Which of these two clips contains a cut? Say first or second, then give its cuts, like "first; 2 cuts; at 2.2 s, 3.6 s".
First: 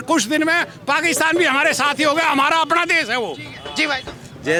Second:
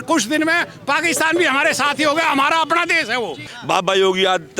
second; 1 cut; at 3.5 s